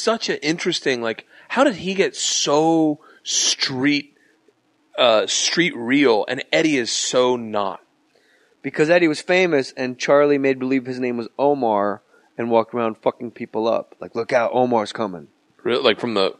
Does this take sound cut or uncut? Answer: uncut